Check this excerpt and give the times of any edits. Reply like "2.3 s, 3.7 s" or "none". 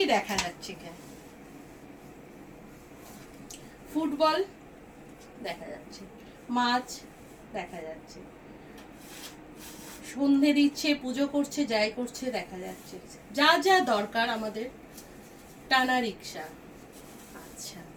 none